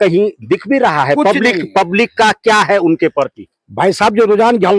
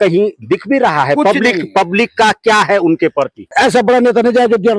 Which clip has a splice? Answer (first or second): second